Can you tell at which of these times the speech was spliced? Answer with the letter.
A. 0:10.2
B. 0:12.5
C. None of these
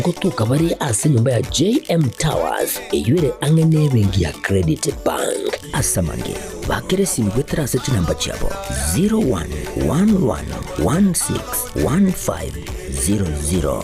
B